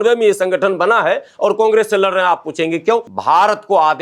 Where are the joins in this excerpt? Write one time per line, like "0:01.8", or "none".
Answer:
0:03.1